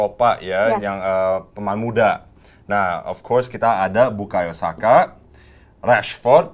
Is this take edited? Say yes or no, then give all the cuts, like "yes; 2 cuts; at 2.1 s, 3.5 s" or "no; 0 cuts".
no; 0 cuts